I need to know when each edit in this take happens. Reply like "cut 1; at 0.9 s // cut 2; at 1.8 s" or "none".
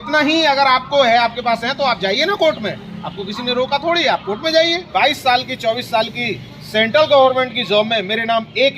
cut 1; at 4.9 s